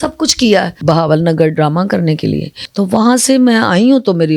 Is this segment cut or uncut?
cut